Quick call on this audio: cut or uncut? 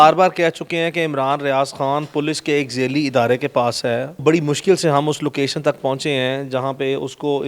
cut